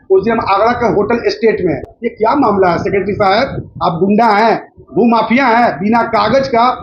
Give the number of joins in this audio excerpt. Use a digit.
1